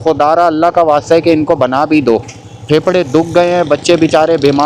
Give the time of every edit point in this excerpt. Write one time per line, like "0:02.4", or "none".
none